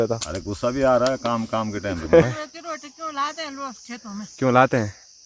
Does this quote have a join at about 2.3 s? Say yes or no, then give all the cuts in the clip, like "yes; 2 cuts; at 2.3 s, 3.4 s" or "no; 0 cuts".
yes; 1 cut; at 2.3 s